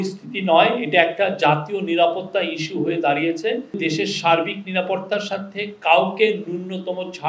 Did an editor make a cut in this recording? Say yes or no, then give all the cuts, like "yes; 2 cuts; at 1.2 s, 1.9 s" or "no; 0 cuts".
yes; 1 cut; at 3.8 s